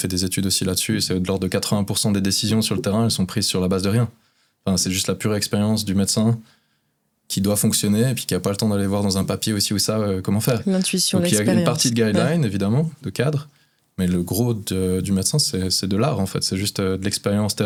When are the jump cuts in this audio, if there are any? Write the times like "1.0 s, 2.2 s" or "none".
none